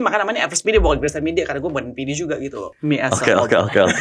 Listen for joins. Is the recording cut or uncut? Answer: cut